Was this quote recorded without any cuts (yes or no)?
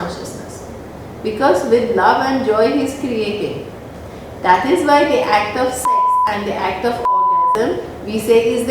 yes